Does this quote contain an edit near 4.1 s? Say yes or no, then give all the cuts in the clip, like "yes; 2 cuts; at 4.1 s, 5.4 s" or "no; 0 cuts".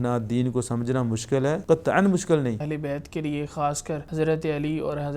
yes; 3 cuts; at 1.6 s, 2.7 s, 4.1 s